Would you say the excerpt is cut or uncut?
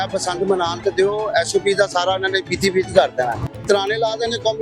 cut